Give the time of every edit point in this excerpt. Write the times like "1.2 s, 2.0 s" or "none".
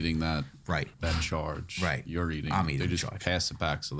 0.9 s